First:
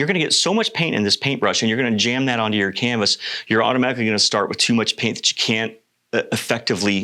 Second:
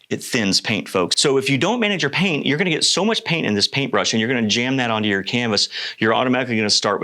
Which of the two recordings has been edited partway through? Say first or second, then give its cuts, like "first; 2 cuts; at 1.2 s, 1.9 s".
second; 1 cut; at 1.1 s